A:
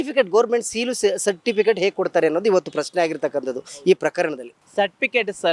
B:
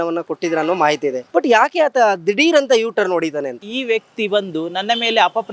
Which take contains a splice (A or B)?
B